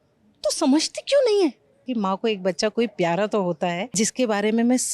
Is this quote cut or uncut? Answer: cut